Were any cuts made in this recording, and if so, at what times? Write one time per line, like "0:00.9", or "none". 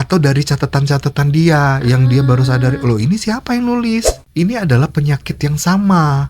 0:04.2